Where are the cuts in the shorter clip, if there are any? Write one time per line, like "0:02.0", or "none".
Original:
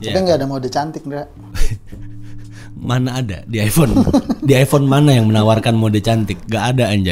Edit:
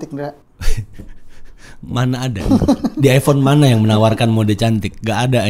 0:02.5